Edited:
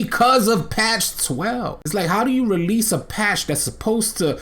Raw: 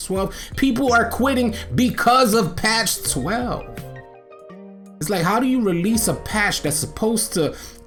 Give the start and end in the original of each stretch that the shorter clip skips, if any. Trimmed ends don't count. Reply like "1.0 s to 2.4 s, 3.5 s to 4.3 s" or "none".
3.7 s to 5.0 s